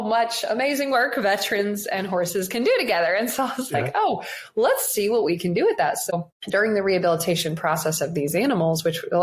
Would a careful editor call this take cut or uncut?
cut